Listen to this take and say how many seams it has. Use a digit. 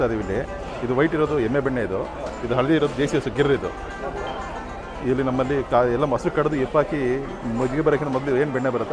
0